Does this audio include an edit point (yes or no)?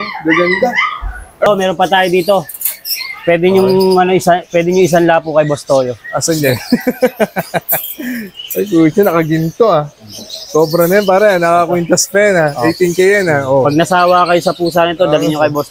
yes